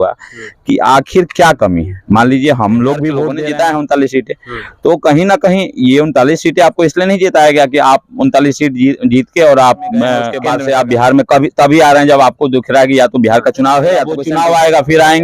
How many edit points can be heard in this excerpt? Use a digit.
3